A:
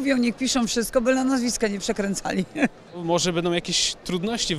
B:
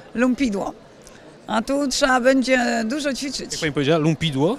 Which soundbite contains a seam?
A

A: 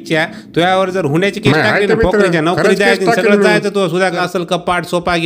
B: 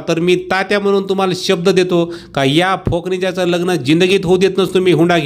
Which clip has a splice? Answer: A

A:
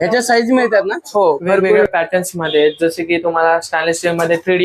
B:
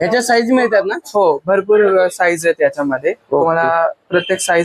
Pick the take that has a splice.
A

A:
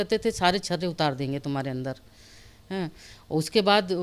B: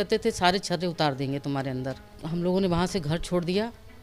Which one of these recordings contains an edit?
B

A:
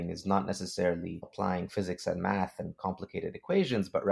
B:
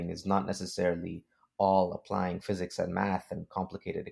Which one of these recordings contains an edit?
A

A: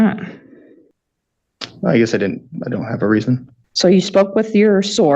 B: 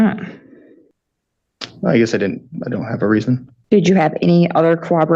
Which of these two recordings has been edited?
A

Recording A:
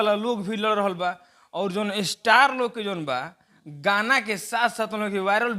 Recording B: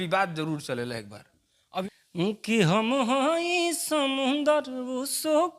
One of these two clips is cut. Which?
B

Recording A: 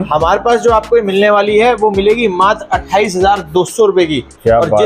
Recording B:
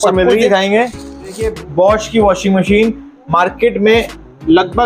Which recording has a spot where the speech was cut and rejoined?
B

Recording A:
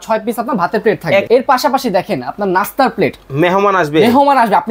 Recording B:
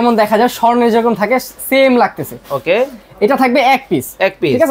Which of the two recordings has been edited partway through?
A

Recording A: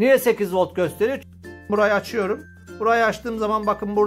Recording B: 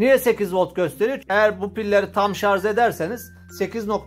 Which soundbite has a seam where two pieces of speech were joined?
A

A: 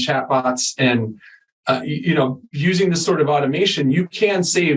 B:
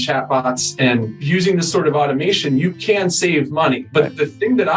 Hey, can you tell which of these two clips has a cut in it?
B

